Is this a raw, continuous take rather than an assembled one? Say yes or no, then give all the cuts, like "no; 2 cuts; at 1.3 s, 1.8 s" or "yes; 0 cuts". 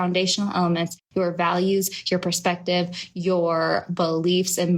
no; 1 cut; at 1.0 s